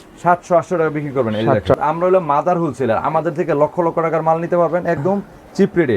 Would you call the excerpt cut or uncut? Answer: cut